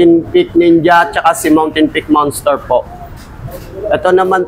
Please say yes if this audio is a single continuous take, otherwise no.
yes